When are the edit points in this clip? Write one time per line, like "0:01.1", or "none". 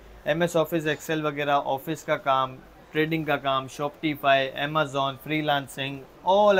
none